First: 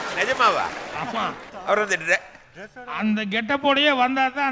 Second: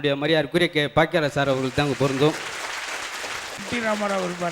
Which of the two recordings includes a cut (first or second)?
second